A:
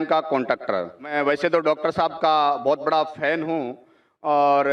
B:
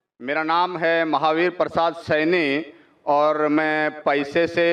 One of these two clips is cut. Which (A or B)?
A